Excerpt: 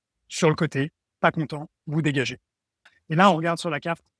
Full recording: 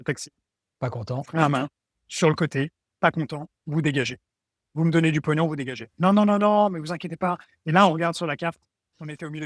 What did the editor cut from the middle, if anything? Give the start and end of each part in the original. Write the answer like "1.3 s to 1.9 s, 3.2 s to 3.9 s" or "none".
4.7 s to 7.4 s